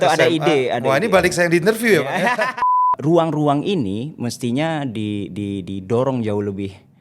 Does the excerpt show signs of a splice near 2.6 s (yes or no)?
yes